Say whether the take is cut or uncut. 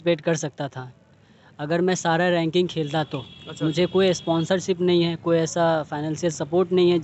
uncut